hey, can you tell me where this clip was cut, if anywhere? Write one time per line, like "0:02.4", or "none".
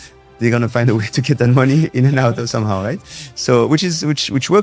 none